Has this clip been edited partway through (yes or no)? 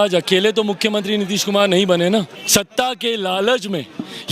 yes